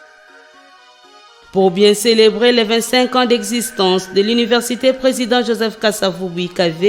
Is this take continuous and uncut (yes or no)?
yes